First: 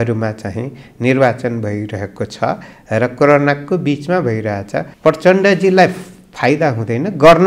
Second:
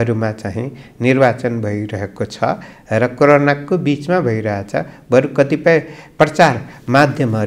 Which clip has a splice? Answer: first; 1 cut; at 4.8 s

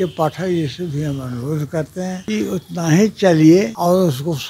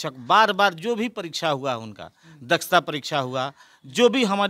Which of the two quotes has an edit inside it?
first; 2 cuts; at 2.2 s, 3.7 s

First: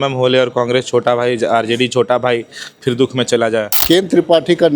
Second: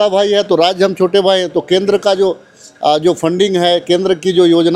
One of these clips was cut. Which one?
first; 1 cut; at 3.7 s

